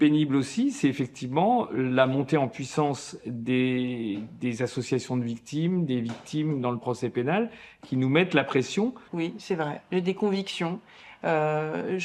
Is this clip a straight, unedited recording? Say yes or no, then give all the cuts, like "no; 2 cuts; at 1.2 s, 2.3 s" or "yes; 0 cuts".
no; 1 cut; at 9.9 s